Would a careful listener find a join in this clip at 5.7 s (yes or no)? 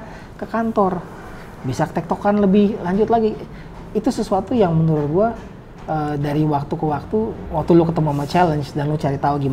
no